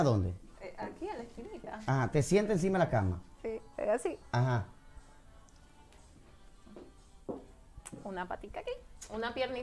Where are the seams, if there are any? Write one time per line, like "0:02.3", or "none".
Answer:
none